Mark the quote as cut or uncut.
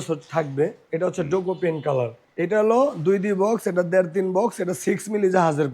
cut